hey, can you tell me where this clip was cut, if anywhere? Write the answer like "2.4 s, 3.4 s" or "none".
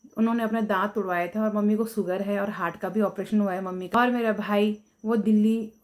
3.9 s